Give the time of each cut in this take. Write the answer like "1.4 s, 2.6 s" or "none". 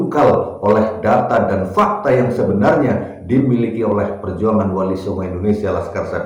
none